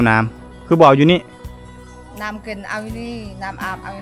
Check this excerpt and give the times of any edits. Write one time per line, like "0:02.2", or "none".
none